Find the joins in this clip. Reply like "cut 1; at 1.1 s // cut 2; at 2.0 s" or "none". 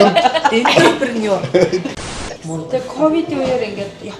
cut 1; at 1.9 s